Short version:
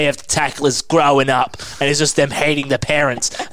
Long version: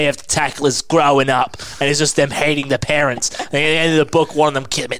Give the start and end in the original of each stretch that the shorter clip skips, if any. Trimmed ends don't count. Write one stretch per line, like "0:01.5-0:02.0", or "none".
none